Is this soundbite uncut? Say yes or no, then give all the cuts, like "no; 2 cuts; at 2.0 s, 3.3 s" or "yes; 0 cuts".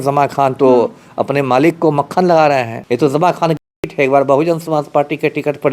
no; 1 cut; at 2.7 s